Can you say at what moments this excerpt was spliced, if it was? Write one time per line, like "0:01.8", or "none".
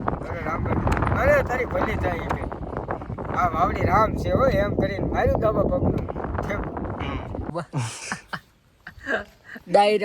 0:07.5

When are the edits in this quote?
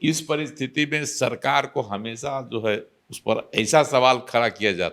0:03.0

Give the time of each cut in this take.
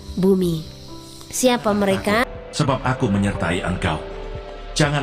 0:02.5

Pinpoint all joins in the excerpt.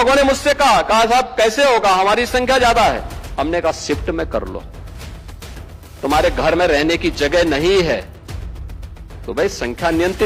none

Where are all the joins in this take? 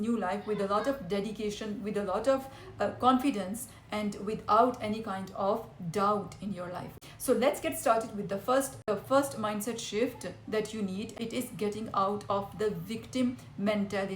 0:06.9
0:08.8
0:11.1

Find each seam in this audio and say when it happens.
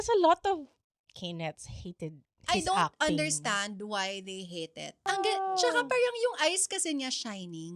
0:05.1

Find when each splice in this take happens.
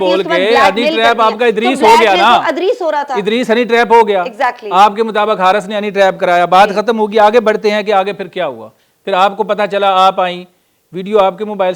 none

